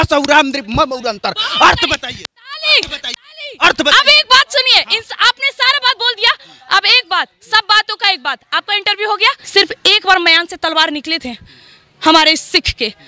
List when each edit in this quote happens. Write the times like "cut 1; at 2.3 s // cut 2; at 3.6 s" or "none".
cut 1; at 9.4 s

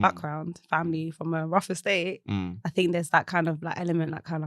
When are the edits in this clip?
none

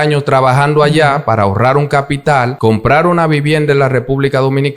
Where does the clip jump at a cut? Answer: cut 1; at 2.5 s

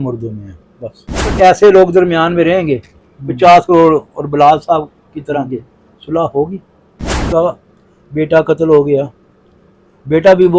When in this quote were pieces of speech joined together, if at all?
cut 1; at 1.3 s // cut 2; at 7.2 s

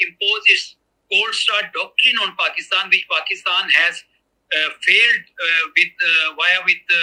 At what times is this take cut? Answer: none

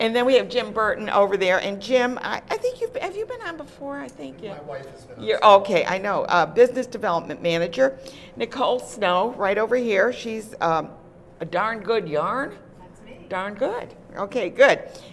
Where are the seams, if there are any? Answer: cut 1; at 4.2 s

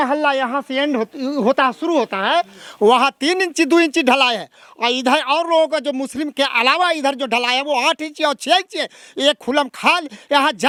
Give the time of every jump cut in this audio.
none

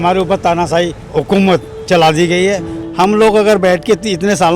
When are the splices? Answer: cut 1; at 1.0 s // cut 2; at 2.8 s

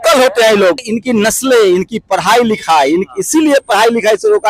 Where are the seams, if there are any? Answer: cut 1; at 0.9 s

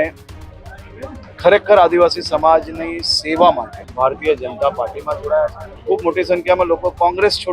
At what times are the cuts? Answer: cut 1; at 3.8 s // cut 2; at 5.7 s

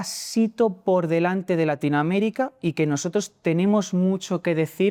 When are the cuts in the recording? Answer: none

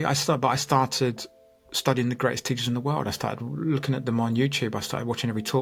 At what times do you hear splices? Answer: none

